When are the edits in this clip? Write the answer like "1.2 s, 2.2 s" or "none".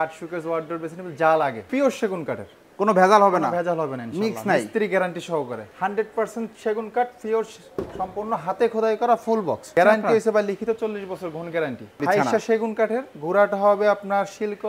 1.7 s, 5.6 s, 9.6 s, 12.0 s

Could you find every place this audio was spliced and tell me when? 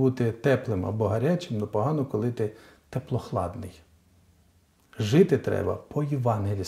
none

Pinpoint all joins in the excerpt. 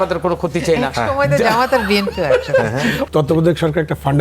3.1 s

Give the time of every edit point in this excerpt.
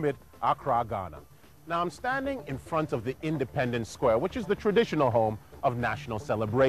3.8 s

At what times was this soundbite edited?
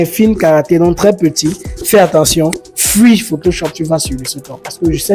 none

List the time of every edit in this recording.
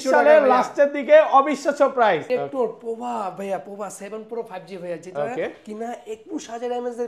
2.2 s

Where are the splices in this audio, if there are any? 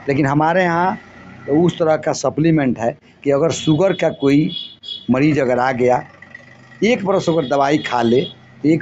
none

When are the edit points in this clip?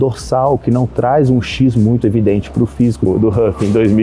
3.1 s

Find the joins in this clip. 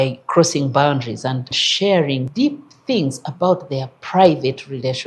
1.6 s, 2.3 s

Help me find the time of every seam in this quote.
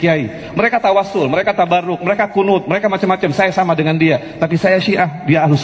none

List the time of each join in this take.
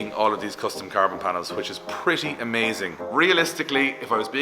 3.0 s

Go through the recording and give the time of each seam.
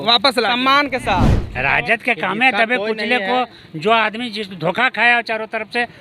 1.4 s

